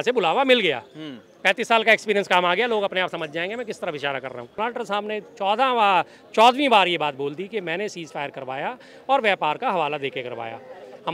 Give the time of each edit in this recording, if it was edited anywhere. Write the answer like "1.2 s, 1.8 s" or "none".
4.6 s